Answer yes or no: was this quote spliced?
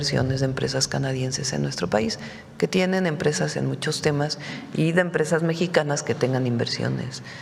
no